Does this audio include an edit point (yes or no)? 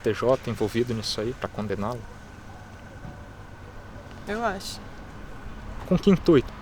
yes